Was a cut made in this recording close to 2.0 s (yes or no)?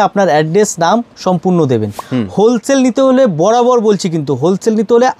yes